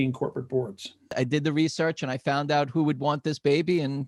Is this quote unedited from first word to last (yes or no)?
no